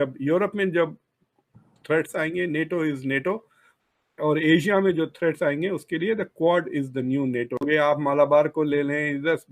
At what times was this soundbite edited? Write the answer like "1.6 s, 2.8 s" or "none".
7.6 s